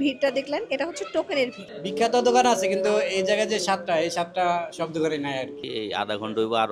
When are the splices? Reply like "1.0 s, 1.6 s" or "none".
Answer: 1.9 s, 5.6 s